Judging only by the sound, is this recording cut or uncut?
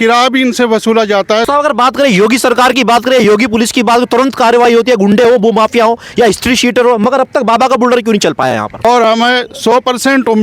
cut